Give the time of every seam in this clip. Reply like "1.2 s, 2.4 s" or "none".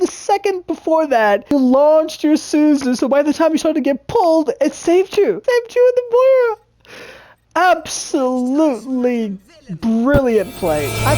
1.5 s, 5.4 s